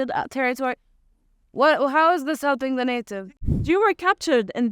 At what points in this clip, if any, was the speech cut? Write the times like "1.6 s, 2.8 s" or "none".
3.2 s